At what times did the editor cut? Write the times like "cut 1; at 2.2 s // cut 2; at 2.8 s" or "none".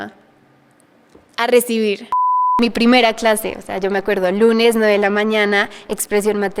cut 1; at 2.2 s